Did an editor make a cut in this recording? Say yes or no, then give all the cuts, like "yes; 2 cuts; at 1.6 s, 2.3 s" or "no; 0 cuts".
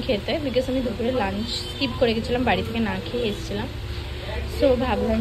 no; 0 cuts